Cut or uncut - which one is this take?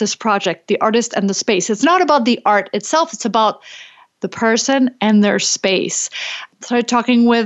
uncut